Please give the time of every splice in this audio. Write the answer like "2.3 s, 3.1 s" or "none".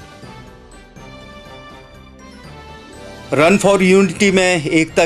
2.1 s